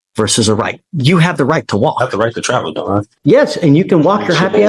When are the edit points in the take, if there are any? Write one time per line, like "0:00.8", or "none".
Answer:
0:03.1